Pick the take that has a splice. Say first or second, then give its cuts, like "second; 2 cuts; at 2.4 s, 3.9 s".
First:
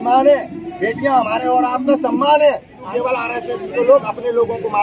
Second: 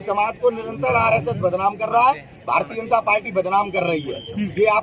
first; 1 cut; at 2.8 s